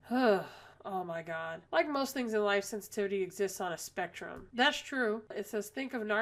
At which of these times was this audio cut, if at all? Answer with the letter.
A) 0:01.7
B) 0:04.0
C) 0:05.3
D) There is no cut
C